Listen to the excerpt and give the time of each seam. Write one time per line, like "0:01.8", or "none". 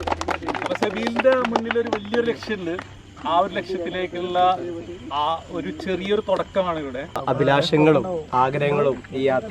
0:07.2

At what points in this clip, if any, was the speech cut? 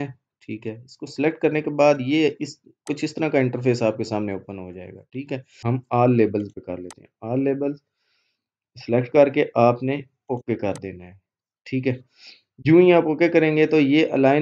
0:05.5

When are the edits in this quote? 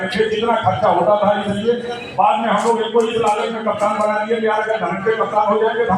none

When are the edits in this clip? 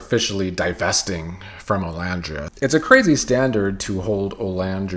0:02.5

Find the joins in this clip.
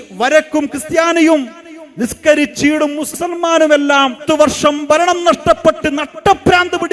0:03.2
0:04.2

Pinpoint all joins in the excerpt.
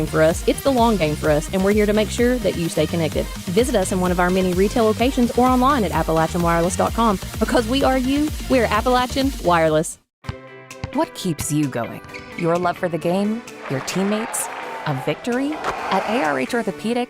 0:10.0

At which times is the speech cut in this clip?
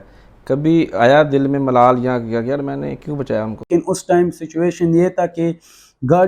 0:03.7

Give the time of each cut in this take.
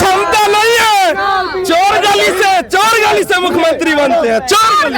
none

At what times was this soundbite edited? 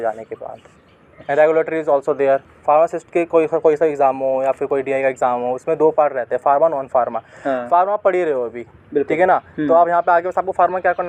0:02.5

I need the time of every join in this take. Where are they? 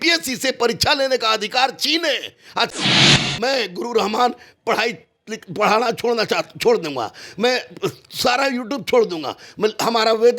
0:03.1

